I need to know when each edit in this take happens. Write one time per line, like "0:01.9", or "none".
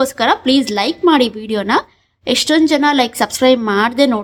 none